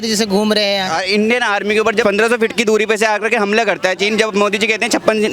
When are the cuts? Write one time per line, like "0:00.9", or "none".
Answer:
0:00.9
0:02.0